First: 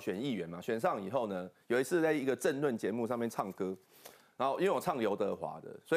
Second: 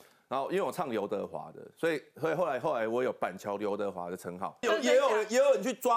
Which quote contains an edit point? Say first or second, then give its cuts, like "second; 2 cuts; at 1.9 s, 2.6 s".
second; 1 cut; at 4.6 s